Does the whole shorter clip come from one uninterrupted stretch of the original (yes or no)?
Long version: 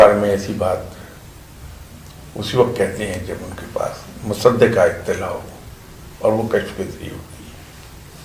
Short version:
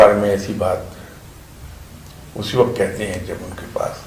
yes